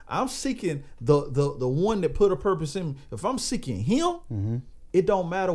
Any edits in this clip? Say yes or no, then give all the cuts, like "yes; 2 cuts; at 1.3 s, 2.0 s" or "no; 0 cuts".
no; 0 cuts